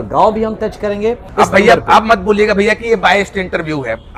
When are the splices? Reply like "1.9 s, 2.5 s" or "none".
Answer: 1.2 s